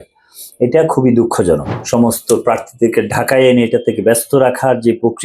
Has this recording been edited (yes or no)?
yes